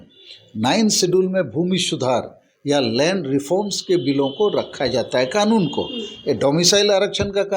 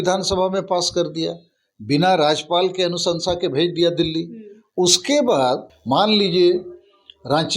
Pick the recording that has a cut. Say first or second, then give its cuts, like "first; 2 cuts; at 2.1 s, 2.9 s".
second; 1 cut; at 5.7 s